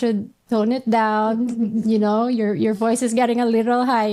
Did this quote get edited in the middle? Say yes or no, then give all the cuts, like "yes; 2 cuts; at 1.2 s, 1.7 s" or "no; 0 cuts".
no; 0 cuts